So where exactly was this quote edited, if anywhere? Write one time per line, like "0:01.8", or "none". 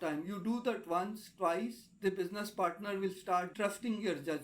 0:03.5